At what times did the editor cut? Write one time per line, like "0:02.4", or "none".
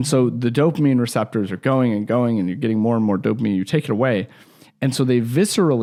none